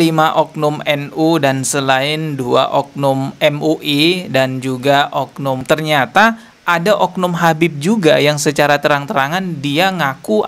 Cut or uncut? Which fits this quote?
cut